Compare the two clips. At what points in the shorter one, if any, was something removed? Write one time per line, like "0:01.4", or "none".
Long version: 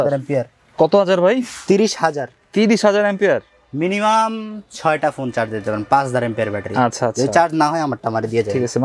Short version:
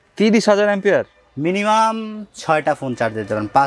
none